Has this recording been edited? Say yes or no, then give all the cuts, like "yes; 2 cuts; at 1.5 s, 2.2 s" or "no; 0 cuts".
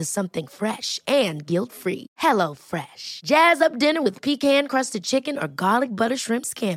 no; 0 cuts